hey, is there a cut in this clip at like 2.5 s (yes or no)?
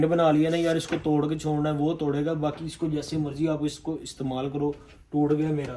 no